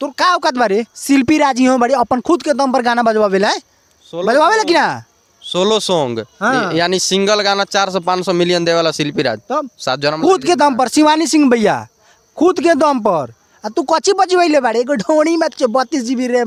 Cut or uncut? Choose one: uncut